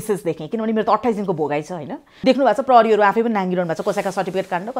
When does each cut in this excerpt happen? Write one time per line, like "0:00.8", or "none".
0:02.1